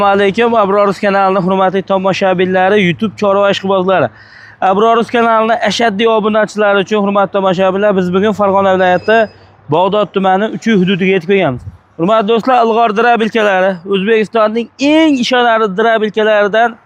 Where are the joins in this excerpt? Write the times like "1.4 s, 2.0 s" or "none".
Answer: none